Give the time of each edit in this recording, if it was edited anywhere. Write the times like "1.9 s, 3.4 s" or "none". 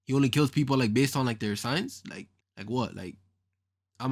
none